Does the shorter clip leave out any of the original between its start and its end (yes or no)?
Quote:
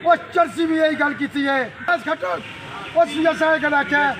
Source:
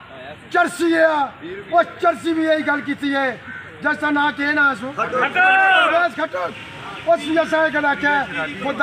yes